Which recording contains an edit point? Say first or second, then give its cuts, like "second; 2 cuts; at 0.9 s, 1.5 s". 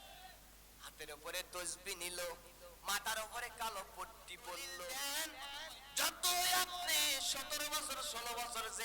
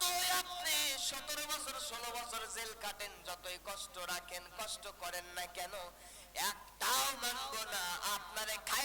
first; 1 cut; at 4.9 s